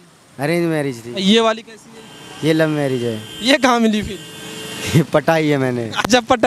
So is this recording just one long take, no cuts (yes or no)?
yes